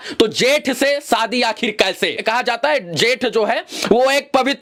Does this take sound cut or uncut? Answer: uncut